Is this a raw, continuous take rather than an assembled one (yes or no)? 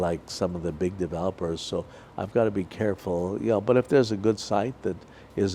yes